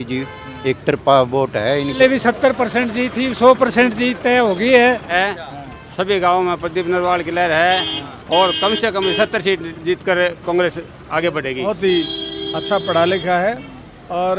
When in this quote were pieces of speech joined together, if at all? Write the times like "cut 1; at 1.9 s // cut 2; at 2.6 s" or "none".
cut 1; at 2.0 s // cut 2; at 5.1 s // cut 3; at 11.6 s